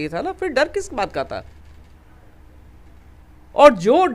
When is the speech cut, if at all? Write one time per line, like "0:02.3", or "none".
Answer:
none